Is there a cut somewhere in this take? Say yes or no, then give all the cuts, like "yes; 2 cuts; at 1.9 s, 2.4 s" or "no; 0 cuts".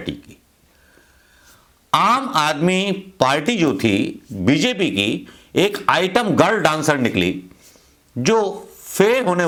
no; 0 cuts